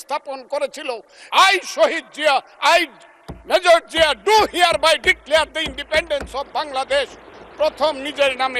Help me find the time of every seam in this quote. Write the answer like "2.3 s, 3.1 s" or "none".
1.1 s